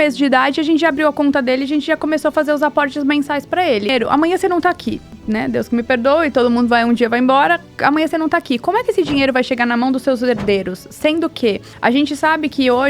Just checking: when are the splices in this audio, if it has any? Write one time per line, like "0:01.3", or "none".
0:03.9
0:05.1
0:11.7